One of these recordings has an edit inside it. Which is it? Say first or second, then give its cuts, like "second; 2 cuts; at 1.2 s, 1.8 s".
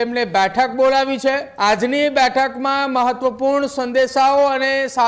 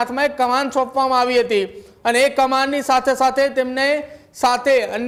first; 1 cut; at 1.5 s